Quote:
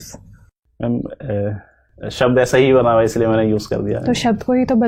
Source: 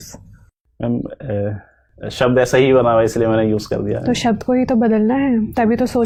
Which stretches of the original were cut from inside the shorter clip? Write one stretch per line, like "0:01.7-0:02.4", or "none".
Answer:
none